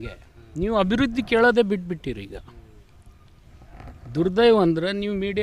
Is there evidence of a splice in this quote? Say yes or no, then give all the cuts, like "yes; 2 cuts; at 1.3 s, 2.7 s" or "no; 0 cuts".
no; 0 cuts